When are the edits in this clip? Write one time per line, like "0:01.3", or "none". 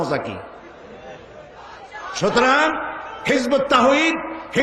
0:01.9